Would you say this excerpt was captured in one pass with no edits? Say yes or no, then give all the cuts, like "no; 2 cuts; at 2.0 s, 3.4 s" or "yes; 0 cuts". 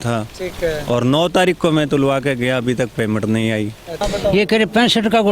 no; 1 cut; at 4.0 s